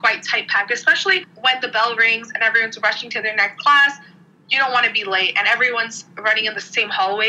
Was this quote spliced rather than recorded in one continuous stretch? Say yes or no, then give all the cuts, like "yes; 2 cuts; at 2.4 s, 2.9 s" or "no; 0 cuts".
no; 0 cuts